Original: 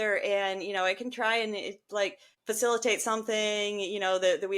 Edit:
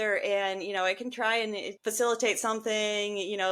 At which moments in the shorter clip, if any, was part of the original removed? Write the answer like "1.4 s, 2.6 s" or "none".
1.7 s